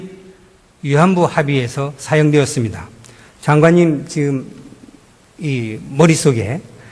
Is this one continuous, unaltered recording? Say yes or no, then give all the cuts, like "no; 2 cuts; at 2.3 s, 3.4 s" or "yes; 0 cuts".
no; 1 cut; at 3.5 s